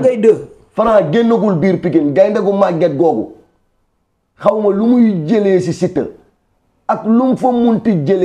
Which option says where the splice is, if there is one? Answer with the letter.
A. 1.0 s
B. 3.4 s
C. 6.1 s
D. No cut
D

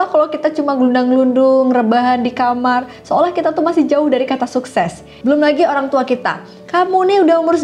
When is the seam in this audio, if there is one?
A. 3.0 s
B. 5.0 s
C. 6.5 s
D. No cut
B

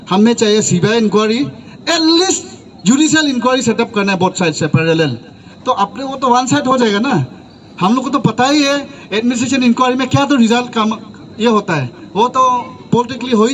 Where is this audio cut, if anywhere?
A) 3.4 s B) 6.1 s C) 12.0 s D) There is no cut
D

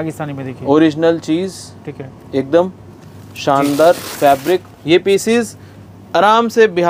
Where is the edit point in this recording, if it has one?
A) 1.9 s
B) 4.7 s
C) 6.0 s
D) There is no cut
B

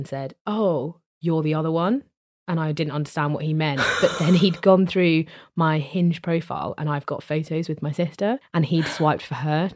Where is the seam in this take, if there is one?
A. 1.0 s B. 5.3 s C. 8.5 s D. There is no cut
C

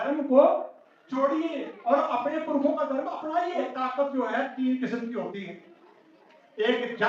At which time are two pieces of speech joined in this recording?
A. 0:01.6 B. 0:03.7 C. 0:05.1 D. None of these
B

